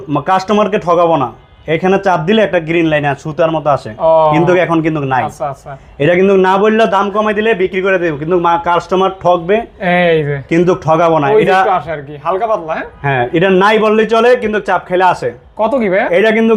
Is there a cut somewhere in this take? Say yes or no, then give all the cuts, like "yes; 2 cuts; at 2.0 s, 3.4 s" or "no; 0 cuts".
no; 0 cuts